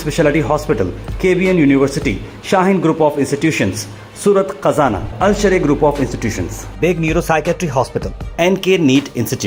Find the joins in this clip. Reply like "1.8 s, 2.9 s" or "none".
none